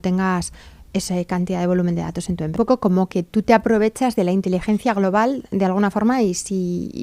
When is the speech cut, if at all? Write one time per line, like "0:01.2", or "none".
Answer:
0:02.6